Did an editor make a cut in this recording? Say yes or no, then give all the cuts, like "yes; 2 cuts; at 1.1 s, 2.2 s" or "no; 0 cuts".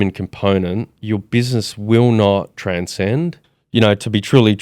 yes; 3 cuts; at 0.9 s, 2.5 s, 3.5 s